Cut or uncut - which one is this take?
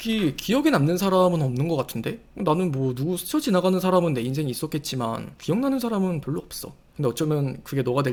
uncut